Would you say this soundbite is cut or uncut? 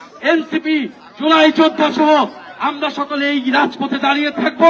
uncut